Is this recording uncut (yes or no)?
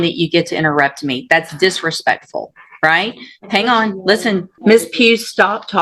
no